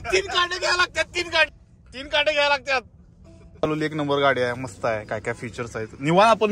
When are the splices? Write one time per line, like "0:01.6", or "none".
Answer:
none